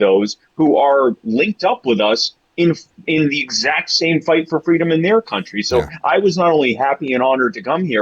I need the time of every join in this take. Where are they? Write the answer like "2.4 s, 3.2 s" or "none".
none